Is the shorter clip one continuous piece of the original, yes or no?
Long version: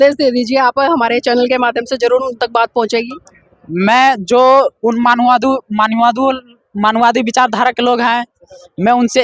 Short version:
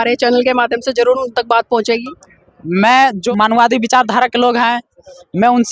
no